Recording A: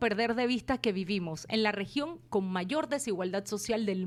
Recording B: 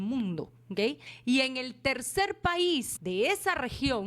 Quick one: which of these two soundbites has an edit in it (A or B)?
B